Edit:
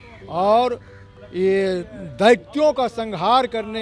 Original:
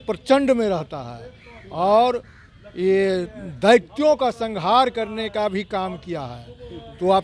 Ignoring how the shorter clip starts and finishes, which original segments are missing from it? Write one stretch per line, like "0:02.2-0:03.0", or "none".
none